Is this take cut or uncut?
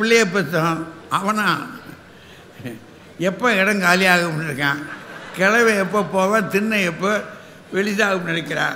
uncut